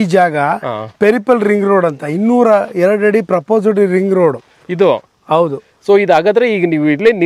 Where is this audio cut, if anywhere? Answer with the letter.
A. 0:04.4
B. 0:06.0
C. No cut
C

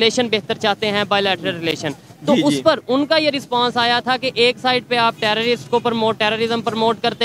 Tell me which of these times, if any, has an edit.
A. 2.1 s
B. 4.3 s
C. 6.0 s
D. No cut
D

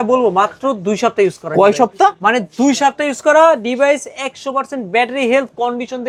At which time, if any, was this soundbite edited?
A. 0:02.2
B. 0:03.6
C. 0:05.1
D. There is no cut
D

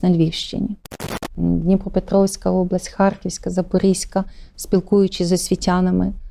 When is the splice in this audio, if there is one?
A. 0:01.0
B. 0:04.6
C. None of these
A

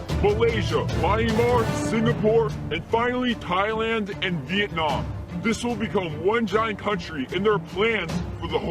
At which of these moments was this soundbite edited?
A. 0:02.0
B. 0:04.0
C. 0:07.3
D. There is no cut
D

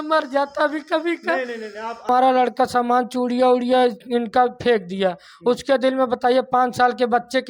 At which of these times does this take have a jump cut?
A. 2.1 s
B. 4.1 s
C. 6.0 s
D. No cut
A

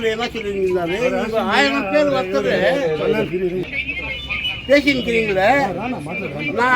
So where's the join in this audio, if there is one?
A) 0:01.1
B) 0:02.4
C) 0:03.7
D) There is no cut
C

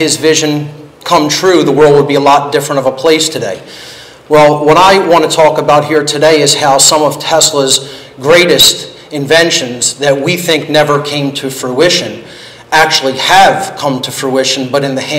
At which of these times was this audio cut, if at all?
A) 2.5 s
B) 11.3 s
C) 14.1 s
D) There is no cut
B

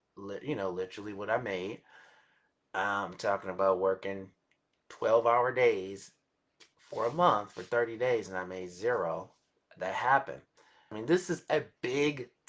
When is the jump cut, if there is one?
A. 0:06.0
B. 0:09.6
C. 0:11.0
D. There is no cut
C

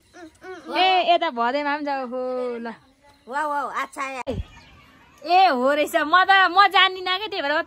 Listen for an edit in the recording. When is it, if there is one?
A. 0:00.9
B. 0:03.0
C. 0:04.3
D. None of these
C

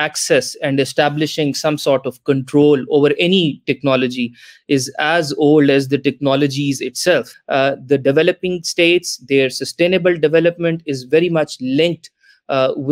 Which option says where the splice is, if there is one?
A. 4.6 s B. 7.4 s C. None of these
B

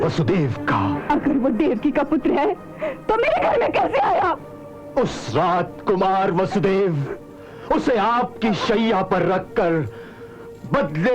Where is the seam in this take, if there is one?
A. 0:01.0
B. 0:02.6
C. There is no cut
A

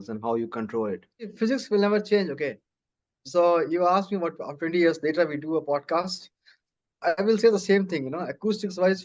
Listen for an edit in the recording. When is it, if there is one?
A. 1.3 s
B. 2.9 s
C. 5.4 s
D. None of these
A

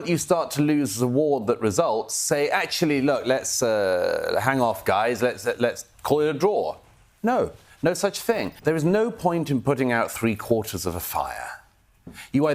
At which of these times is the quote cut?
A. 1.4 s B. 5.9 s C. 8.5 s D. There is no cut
C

